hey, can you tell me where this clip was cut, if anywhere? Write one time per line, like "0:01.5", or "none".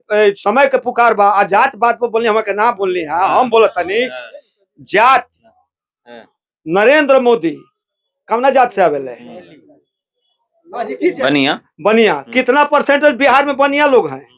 none